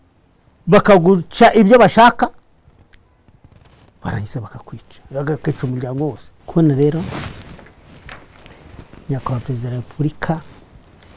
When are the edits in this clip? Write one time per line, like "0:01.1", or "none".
0:06.3